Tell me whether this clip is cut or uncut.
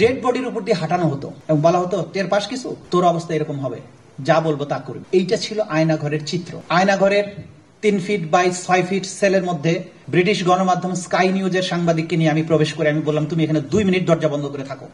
cut